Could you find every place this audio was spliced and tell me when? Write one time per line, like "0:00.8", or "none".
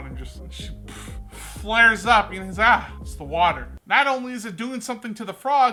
none

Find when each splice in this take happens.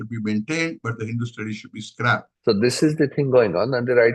0:02.3

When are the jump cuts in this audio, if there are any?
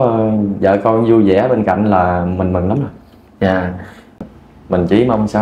0:04.3

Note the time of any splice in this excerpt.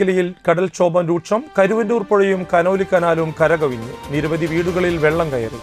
none

